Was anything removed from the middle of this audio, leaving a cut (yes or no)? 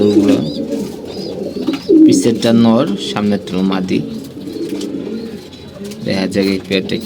no